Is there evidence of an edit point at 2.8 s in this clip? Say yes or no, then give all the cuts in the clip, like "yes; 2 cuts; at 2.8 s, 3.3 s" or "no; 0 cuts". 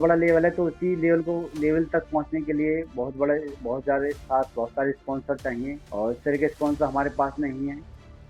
no; 0 cuts